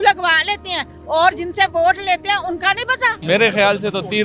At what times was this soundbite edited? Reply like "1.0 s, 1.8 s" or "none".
3.2 s